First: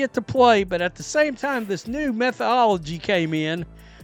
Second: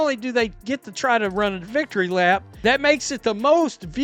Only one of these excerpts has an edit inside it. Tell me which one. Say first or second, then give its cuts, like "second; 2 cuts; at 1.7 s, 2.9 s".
second; 1 cut; at 2.5 s